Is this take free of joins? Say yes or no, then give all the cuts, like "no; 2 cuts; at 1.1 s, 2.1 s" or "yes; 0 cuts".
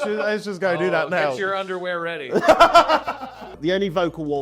no; 1 cut; at 3.5 s